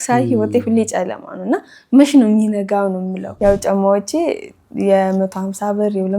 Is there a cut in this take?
yes; 1 cut; at 3.4 s

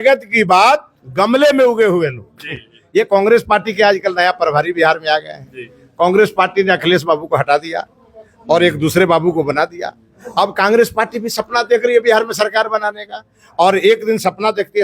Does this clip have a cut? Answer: no; 0 cuts

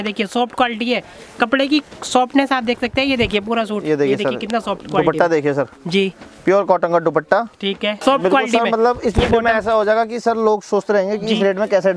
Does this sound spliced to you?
yes; 1 cut; at 7.9 s

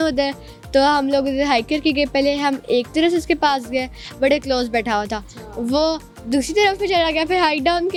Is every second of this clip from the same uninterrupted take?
yes; 0 cuts

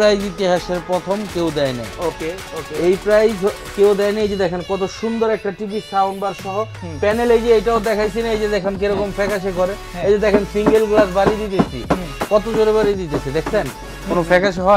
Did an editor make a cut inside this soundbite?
no; 0 cuts

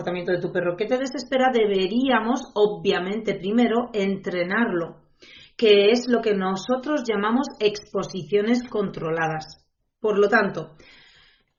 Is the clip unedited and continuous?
yes; 0 cuts

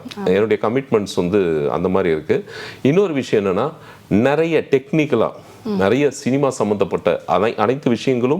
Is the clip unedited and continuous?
yes; 0 cuts

